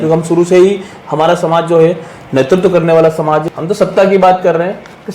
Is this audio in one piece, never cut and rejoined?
no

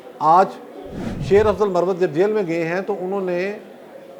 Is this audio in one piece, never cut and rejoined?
yes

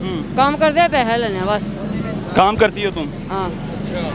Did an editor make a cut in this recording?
no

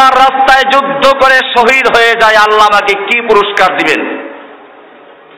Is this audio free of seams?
yes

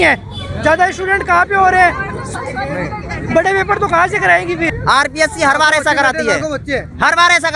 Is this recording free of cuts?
no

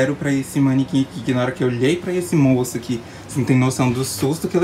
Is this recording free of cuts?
yes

